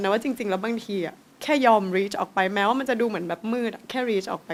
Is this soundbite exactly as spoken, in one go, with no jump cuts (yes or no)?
yes